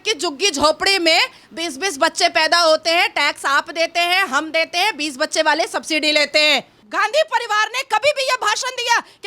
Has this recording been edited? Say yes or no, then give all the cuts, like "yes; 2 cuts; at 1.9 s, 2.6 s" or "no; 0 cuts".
yes; 1 cut; at 6.8 s